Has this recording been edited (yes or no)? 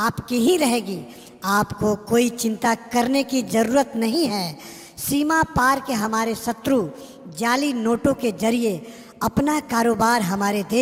no